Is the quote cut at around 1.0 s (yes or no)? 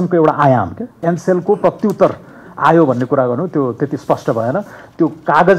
yes